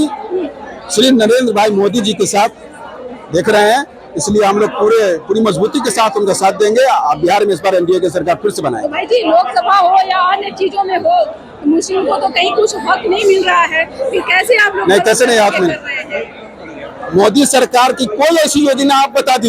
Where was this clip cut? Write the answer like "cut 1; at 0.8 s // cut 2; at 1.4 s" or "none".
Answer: none

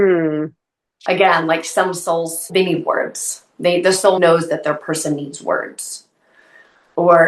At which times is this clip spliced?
cut 1; at 2.5 s // cut 2; at 4.2 s

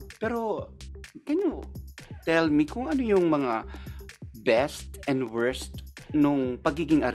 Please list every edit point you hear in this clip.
none

